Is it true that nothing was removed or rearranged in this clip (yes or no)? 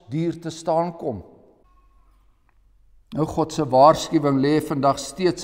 no